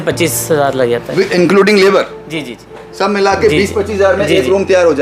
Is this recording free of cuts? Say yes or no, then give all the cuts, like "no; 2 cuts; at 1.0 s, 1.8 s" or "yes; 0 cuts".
yes; 0 cuts